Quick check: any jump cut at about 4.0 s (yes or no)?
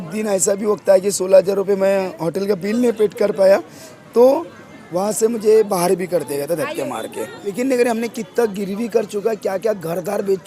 no